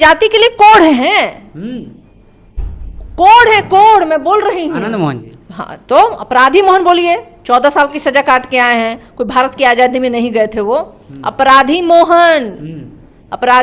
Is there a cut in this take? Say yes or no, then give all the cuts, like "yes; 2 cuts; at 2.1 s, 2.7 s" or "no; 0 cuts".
no; 0 cuts